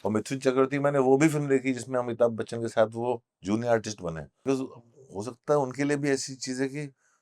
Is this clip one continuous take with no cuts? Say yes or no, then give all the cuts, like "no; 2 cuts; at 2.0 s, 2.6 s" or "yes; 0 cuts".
no; 1 cut; at 4.3 s